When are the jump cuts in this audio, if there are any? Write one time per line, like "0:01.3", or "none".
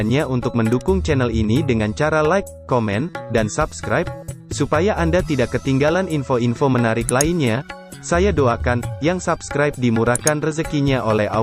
none

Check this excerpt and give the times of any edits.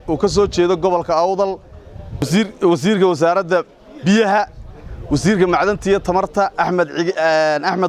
0:02.3

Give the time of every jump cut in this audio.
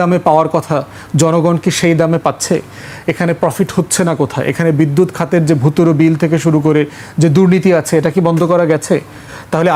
none

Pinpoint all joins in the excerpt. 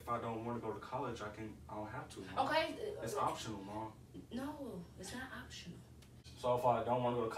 0:04.2
0:06.2

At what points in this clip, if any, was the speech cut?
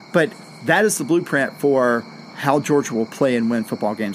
none

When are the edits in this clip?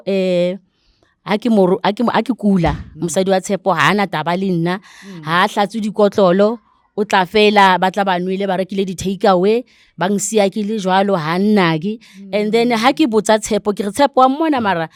none

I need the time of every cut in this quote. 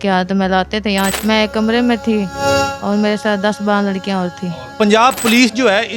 0:01.2
0:04.7

